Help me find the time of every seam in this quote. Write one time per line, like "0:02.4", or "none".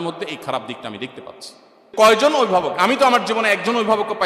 0:01.9